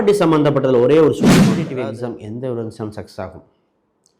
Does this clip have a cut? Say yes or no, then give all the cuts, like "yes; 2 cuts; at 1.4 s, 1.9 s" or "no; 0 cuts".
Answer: yes; 1 cut; at 1.6 s